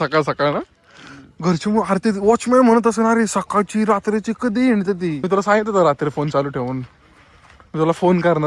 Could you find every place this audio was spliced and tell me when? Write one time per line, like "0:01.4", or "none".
0:05.2